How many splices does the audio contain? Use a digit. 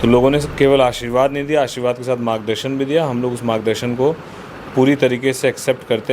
0